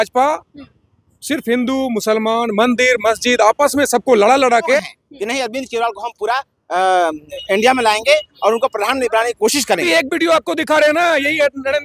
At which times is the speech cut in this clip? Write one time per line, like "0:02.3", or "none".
0:04.8
0:09.9